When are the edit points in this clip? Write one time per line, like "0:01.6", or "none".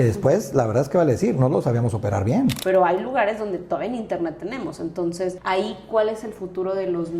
0:02.6
0:05.4